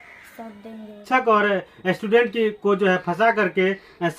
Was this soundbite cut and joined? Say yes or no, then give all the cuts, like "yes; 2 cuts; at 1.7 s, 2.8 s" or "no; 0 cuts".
yes; 1 cut; at 0.9 s